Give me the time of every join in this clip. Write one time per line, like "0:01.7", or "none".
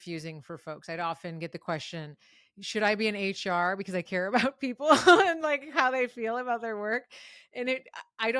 none